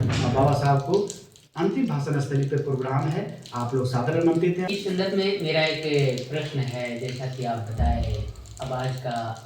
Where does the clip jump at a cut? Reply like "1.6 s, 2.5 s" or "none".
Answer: 4.7 s